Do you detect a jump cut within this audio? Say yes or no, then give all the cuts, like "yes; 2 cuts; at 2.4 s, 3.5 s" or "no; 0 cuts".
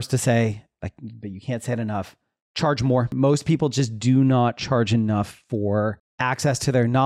yes; 2 cuts; at 3.1 s, 6.1 s